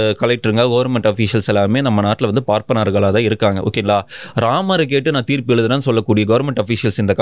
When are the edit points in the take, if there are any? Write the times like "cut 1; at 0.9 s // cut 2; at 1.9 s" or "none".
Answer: none